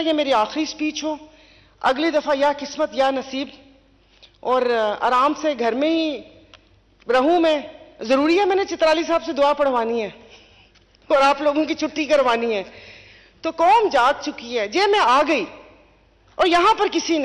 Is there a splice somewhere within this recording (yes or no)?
no